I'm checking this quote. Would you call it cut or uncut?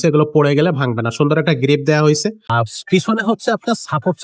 cut